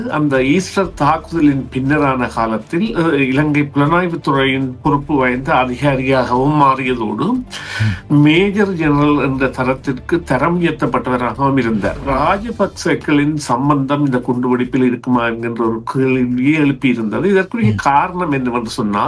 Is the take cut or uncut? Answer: cut